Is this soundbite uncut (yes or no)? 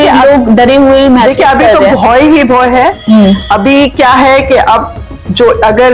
yes